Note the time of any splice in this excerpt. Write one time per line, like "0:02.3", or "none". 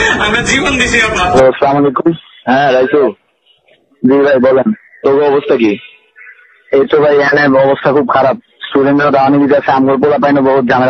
0:01.3